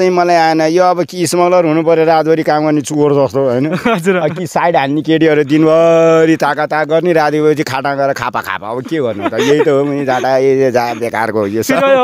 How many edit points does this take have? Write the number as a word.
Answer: zero